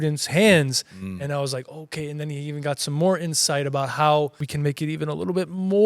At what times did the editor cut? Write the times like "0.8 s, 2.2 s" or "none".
4.4 s